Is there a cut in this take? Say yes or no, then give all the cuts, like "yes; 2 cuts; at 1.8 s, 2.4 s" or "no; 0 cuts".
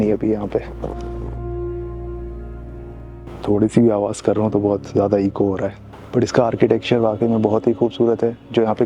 no; 0 cuts